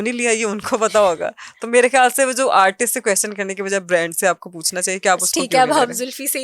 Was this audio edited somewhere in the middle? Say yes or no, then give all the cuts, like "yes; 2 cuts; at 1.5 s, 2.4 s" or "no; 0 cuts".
no; 0 cuts